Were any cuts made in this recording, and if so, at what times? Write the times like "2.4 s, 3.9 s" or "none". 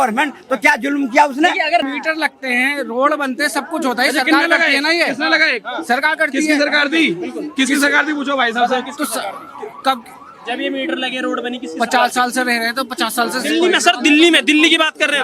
1.8 s